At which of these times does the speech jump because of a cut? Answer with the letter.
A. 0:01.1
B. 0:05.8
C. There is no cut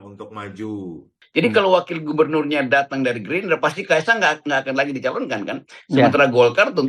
A